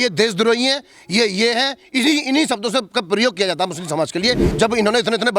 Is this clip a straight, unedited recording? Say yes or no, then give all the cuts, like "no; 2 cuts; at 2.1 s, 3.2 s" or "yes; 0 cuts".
no; 1 cut; at 4.5 s